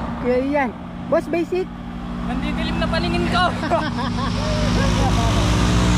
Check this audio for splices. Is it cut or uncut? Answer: uncut